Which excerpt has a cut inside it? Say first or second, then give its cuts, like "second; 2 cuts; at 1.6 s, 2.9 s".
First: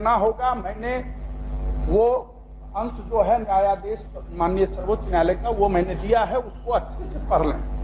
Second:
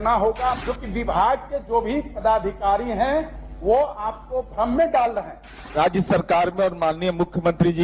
second; 2 cuts; at 1.1 s, 5.6 s